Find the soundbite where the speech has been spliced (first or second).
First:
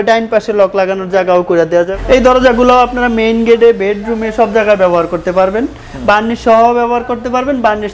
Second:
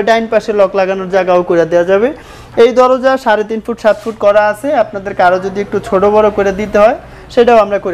first